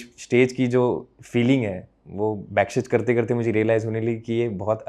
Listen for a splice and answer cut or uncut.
uncut